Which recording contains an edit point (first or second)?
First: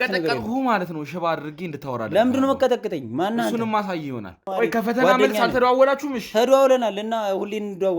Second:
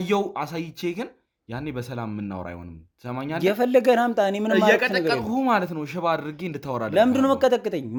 first